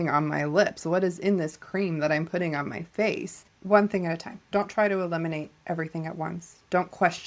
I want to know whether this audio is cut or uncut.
cut